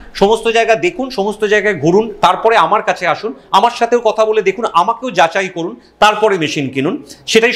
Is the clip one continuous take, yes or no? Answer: yes